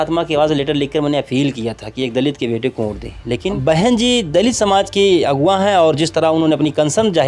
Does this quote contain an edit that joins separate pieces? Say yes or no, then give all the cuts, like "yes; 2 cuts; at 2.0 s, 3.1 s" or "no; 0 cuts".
yes; 1 cut; at 3.6 s